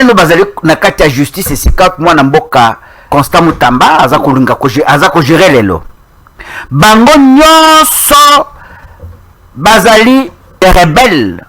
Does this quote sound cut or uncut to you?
cut